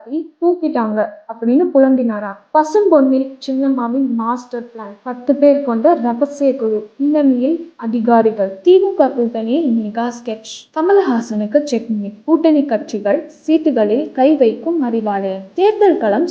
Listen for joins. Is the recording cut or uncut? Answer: cut